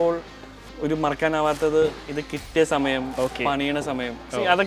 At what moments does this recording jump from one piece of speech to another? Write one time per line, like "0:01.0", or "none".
none